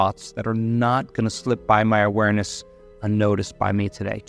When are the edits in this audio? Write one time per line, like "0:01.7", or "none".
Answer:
none